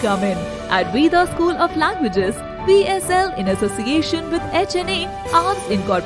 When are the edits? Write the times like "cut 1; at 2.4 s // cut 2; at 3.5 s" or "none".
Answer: none